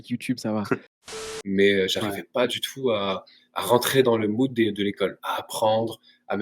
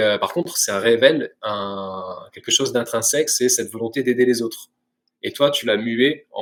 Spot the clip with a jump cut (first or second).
first